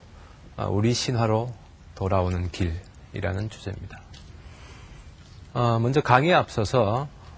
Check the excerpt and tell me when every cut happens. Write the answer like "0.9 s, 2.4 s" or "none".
none